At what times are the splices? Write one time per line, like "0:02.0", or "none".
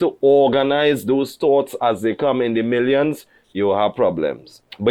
none